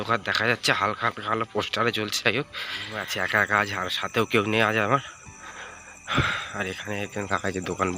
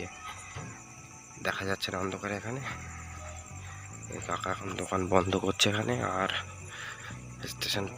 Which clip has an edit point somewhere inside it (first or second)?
first